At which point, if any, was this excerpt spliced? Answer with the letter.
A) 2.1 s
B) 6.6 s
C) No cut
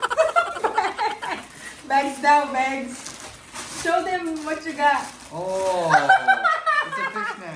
C